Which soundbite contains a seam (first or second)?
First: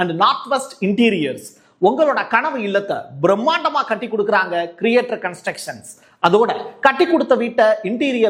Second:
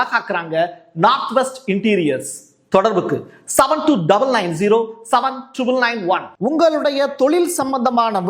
second